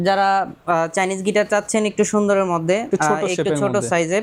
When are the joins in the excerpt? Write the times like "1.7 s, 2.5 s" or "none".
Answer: none